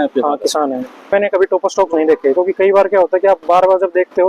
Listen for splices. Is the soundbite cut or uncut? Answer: cut